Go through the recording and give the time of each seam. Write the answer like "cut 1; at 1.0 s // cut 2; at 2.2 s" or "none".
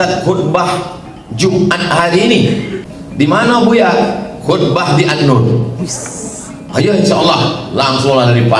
cut 1; at 2.8 s